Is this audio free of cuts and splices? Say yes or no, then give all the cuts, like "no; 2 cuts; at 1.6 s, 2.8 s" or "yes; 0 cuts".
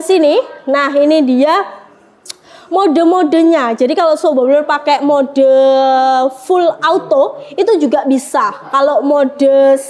yes; 0 cuts